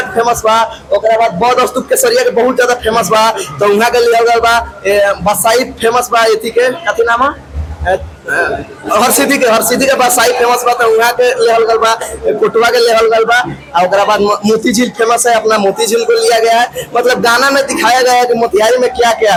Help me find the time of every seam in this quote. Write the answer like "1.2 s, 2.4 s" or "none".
none